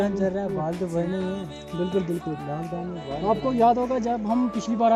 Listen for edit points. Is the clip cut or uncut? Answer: uncut